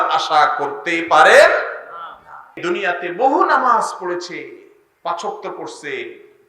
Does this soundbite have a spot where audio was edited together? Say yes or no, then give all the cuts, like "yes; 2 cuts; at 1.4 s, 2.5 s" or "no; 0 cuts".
yes; 1 cut; at 2.6 s